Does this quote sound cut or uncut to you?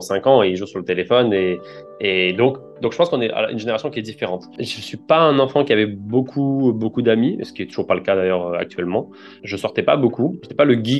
uncut